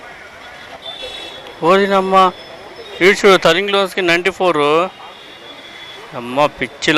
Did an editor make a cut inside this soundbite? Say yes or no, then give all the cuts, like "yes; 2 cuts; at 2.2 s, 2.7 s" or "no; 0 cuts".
yes; 1 cut; at 1.0 s